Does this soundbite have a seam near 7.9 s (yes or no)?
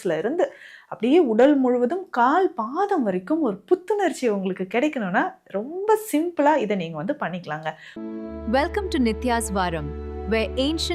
yes